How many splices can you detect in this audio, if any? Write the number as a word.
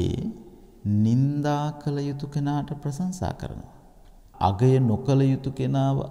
one